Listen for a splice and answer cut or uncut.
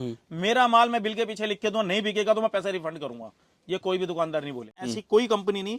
cut